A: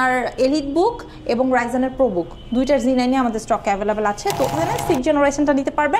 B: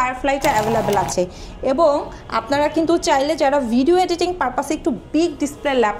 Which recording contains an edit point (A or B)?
A